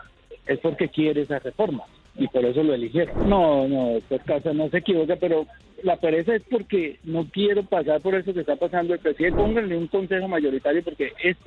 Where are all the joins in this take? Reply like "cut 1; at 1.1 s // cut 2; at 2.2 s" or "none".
cut 1; at 3.1 s // cut 2; at 9.3 s